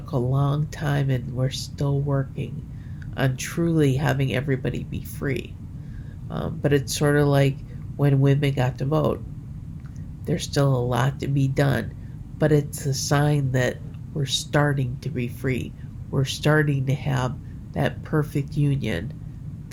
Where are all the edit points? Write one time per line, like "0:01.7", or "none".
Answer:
none